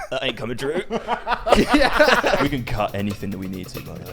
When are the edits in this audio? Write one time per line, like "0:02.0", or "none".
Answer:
0:02.4